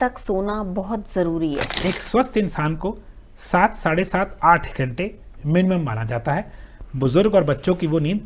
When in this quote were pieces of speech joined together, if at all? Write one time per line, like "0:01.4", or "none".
0:01.7